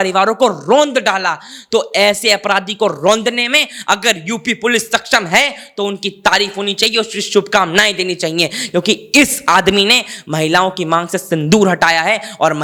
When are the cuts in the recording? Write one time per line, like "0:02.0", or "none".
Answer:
none